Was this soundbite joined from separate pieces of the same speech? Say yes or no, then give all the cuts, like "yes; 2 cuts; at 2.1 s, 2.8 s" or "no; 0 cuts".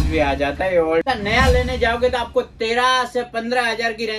yes; 1 cut; at 1.0 s